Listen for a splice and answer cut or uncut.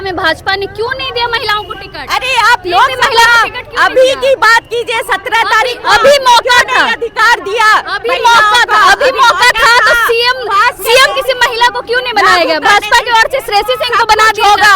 uncut